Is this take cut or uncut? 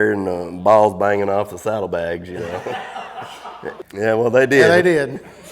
cut